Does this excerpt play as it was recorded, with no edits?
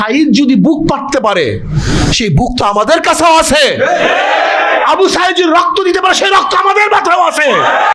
yes; 0 cuts

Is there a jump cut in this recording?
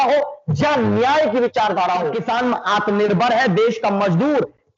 yes; 1 cut; at 2.2 s

